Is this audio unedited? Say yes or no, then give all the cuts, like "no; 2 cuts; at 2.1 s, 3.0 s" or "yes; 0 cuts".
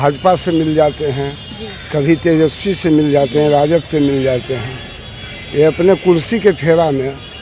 yes; 0 cuts